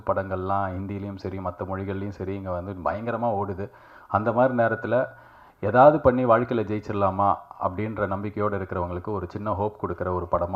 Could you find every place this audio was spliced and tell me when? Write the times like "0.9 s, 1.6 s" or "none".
none